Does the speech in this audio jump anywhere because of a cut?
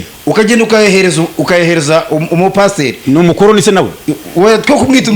no; 0 cuts

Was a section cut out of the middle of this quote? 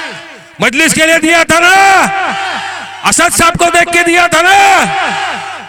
no; 0 cuts

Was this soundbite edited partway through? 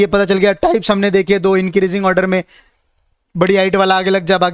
no; 0 cuts

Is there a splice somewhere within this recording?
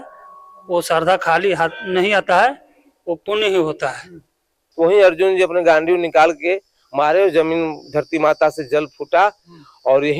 yes; 1 cut; at 4.6 s

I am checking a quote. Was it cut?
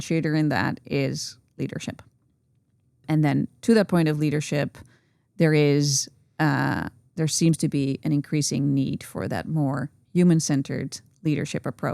yes; 1 cut; at 3.1 s

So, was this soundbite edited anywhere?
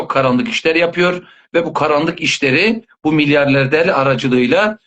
no; 0 cuts

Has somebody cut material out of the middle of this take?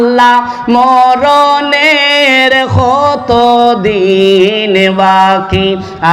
no; 0 cuts

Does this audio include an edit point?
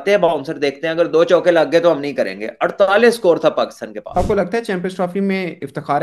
yes; 1 cut; at 4.2 s

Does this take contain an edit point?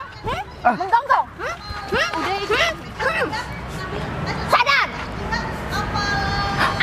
no; 0 cuts

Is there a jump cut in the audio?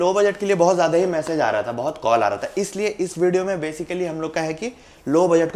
no; 0 cuts

